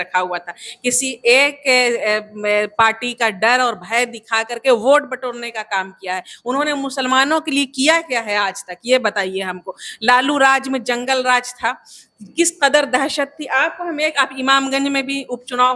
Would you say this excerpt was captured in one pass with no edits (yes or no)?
yes